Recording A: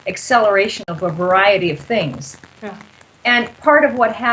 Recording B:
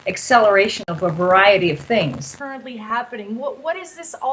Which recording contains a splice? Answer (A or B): A